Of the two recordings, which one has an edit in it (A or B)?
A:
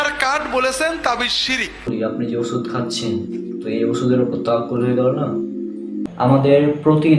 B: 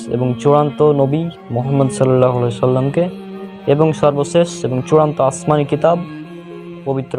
A